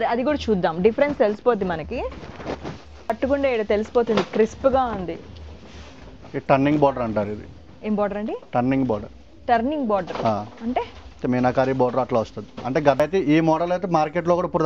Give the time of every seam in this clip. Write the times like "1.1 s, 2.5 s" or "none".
3.1 s, 13.0 s